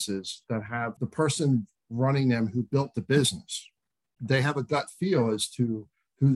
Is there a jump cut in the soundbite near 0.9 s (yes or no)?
yes